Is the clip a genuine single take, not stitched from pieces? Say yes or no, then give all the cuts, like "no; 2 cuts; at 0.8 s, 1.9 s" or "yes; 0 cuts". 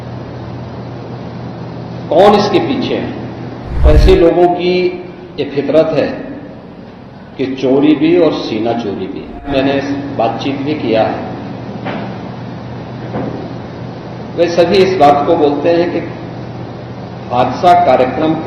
no; 2 cuts; at 3.9 s, 9.5 s